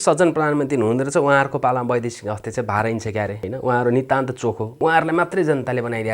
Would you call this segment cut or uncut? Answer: cut